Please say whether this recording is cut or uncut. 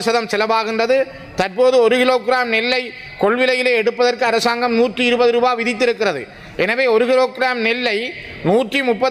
uncut